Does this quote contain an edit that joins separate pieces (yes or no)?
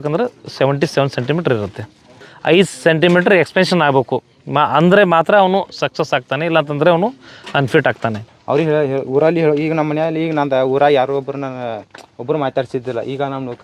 yes